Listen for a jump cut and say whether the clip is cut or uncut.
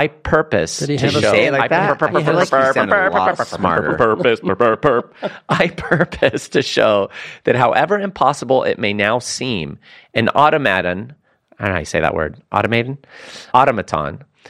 cut